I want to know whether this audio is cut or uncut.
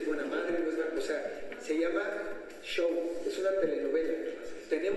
uncut